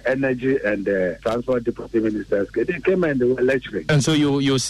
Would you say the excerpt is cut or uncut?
cut